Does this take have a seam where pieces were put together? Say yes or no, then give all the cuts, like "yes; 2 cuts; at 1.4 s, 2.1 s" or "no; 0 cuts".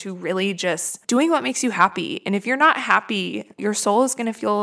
no; 0 cuts